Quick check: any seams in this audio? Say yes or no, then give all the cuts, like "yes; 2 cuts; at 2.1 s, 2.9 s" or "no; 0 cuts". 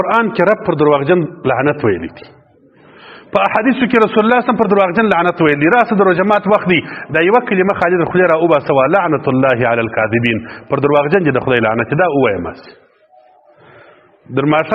no; 0 cuts